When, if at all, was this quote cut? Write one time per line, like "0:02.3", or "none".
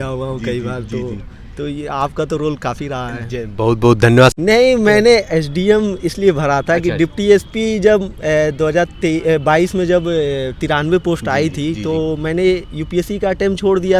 0:04.3